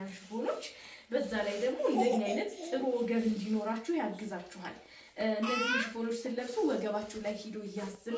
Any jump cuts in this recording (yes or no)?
no